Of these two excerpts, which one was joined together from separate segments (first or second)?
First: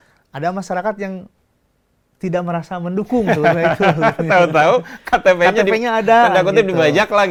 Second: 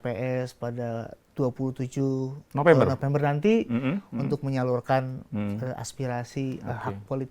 second